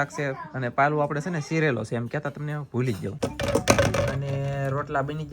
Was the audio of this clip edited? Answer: yes; 1 cut; at 3.1 s

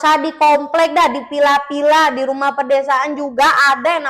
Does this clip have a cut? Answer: no; 0 cuts

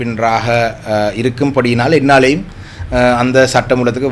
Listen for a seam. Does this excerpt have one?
no; 0 cuts

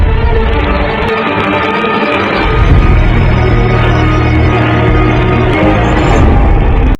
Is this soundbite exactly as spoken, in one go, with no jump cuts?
yes; 0 cuts

